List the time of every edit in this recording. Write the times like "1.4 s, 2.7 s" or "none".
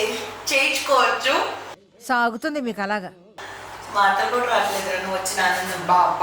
none